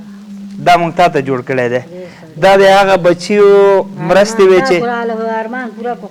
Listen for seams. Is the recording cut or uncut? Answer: uncut